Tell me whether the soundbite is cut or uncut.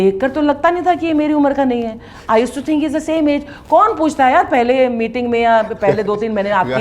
uncut